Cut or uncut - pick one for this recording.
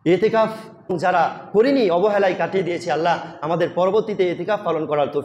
cut